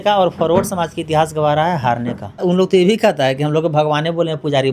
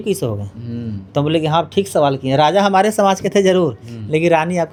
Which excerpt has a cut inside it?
first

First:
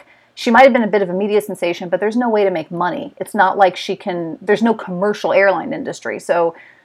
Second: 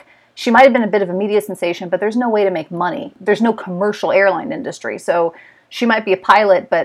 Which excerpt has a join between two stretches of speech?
second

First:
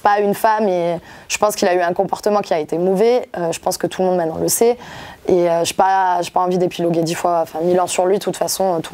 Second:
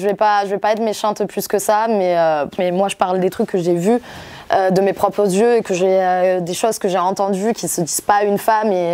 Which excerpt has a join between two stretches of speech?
second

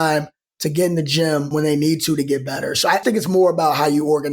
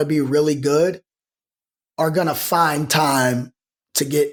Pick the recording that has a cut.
first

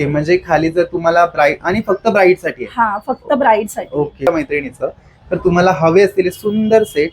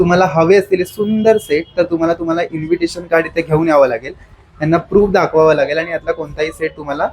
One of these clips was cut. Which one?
first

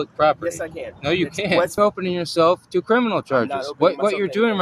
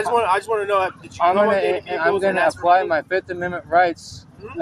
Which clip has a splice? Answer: first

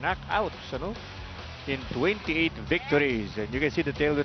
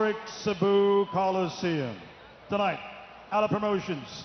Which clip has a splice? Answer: first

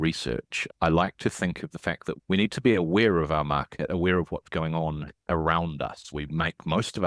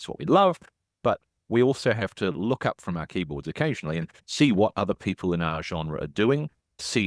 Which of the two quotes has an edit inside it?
first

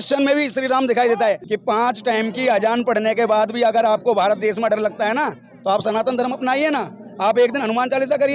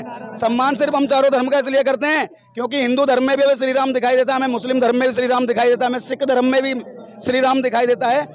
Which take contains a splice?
first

